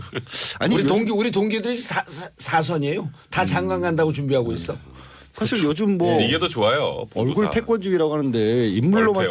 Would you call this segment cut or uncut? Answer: uncut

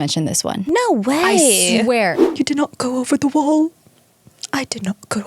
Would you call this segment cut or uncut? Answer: cut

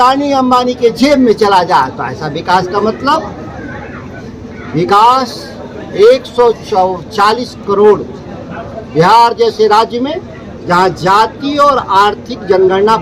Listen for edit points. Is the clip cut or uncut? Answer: uncut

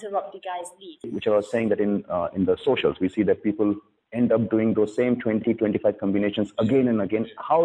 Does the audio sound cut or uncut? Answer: cut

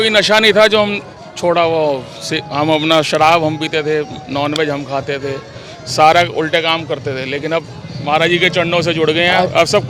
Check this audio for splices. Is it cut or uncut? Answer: uncut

